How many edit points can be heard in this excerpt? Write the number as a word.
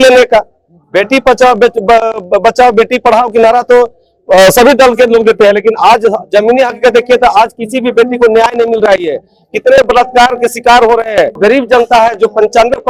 one